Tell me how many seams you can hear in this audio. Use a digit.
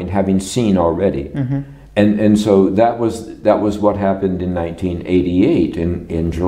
0